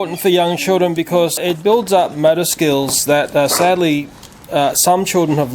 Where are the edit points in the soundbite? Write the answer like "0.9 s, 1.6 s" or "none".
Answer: 1.4 s